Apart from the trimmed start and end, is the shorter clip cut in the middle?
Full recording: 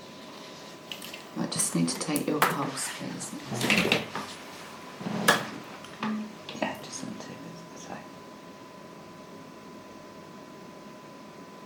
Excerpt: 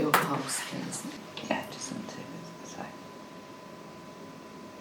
yes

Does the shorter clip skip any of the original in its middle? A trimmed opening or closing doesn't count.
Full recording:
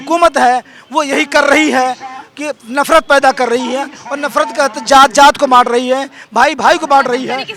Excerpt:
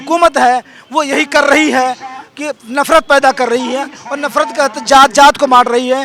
no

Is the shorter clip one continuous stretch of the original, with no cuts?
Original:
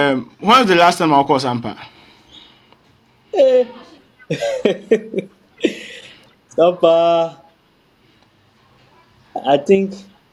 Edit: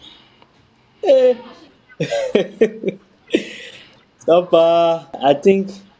no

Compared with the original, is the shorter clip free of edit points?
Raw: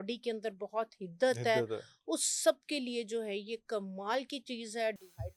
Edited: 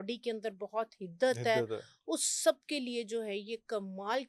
yes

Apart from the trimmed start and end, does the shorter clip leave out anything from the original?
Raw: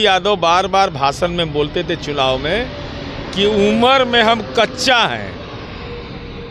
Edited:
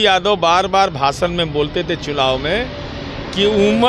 no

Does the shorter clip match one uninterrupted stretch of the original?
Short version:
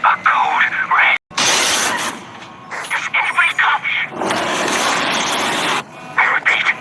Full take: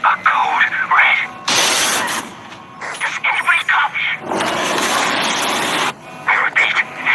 no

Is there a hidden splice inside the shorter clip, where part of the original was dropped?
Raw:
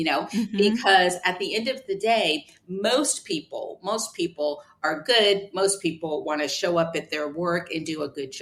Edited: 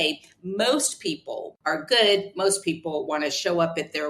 yes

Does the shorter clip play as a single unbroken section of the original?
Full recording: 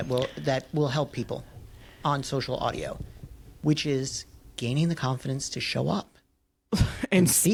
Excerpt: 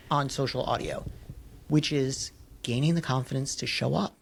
yes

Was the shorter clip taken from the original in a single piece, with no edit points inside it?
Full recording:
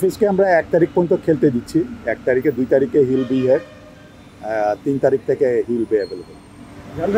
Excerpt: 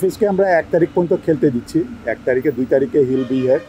yes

